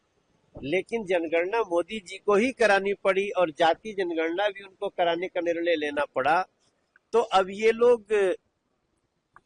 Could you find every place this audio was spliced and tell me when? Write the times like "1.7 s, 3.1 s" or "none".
none